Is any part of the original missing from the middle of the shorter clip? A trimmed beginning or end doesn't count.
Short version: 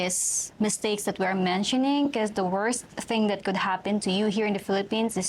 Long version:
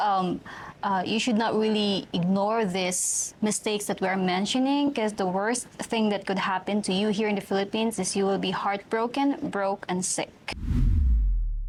no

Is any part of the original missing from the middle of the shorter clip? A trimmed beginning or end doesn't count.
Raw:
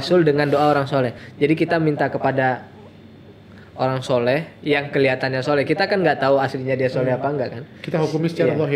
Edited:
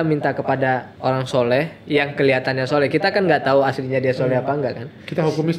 yes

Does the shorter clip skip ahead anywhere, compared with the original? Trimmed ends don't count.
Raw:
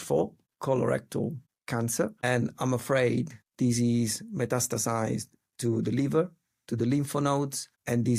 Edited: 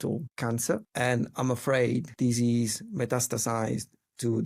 yes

